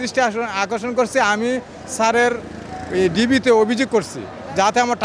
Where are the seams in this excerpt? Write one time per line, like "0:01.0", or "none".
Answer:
none

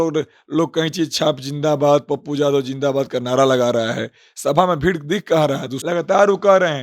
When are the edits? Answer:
0:05.7

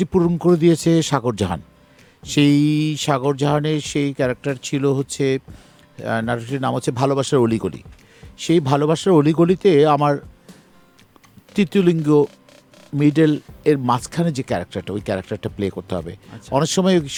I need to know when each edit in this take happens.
none

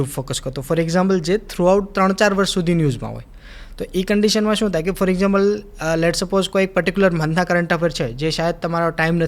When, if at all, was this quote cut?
none

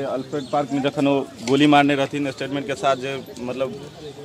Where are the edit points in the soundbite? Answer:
none

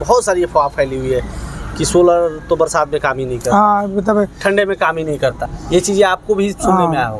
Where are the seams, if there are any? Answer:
0:05.5

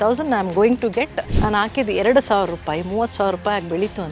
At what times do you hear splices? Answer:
0:01.2

